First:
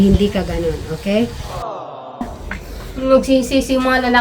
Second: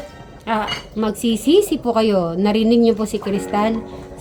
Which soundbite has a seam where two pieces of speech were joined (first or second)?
first